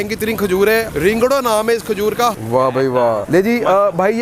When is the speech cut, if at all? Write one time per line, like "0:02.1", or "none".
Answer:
0:00.9
0:02.3
0:03.2

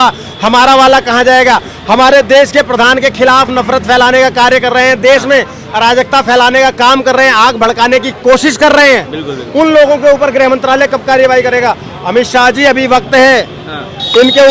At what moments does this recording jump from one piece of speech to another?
none

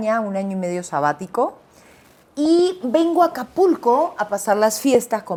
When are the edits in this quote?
none

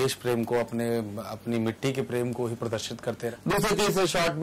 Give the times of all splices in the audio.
0:03.3

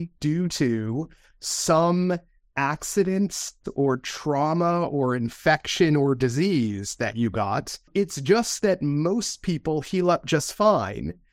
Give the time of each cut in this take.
0:07.9

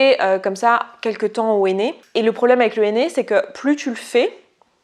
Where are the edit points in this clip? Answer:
0:02.0

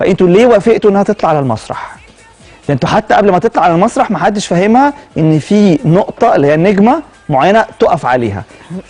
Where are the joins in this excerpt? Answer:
0:07.9

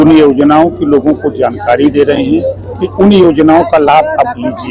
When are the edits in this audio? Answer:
none

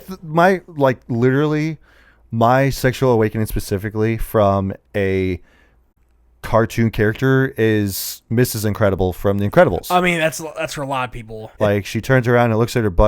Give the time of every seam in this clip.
0:11.5

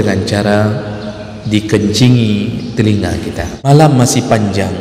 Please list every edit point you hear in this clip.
0:03.7

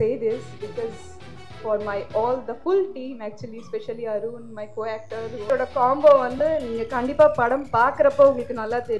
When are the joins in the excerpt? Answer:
0:05.5

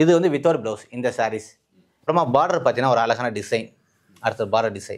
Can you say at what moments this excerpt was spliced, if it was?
0:02.1

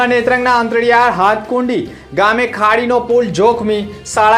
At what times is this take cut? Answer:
none

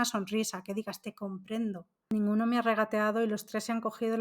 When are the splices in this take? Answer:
0:02.1

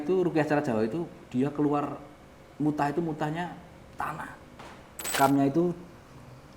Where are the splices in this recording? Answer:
0:05.1

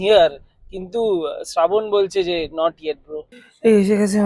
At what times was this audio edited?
0:03.3

